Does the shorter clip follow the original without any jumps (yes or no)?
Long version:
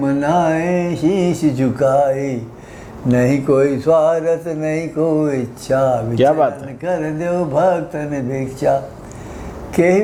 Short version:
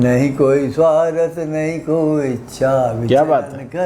yes